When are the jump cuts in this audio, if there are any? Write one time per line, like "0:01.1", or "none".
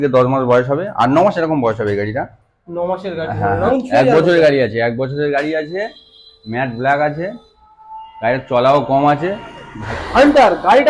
0:03.7
0:09.9